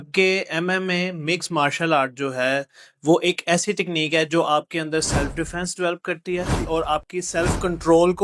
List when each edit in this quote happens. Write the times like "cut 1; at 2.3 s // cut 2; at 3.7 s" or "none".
none